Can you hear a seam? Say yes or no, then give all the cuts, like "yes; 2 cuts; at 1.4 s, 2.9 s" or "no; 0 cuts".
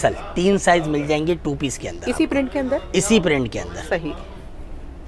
no; 0 cuts